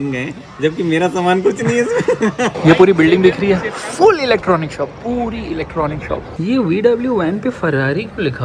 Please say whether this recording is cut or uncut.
cut